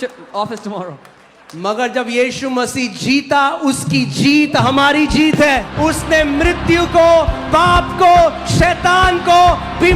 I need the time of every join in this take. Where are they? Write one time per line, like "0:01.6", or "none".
0:05.7